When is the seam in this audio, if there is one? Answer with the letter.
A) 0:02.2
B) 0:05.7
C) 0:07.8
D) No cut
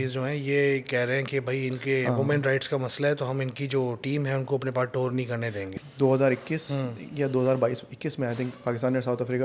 B